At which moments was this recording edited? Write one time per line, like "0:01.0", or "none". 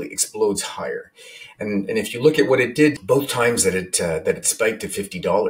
0:03.0